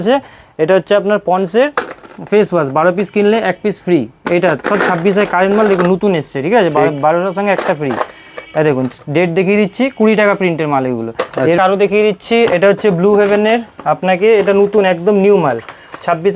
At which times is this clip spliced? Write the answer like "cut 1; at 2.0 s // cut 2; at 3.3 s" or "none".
cut 1; at 11.6 s